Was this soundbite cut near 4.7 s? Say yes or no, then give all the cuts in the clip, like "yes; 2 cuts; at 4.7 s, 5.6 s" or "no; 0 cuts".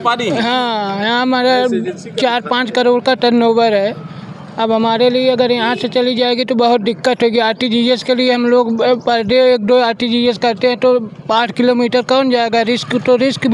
no; 0 cuts